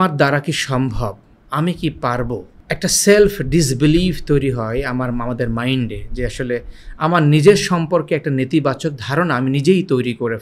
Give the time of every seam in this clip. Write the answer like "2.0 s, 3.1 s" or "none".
2.5 s